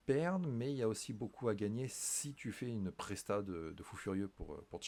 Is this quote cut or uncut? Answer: uncut